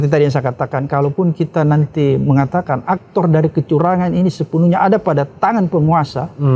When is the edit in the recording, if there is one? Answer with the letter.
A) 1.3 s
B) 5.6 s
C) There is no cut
C